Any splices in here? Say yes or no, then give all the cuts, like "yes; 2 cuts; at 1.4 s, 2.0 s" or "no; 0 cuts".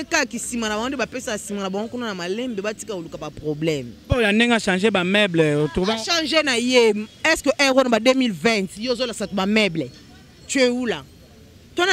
yes; 1 cut; at 4.0 s